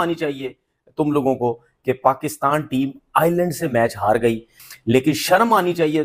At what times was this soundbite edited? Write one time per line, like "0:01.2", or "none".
none